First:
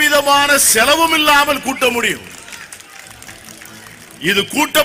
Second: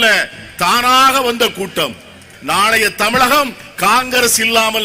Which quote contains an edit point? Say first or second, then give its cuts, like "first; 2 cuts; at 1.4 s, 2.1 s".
second; 1 cut; at 2.3 s